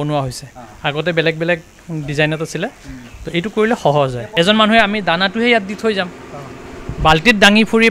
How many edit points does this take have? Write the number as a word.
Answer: one